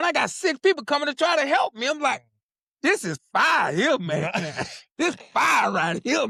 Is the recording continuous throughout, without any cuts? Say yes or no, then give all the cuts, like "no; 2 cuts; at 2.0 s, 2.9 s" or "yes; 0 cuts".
yes; 0 cuts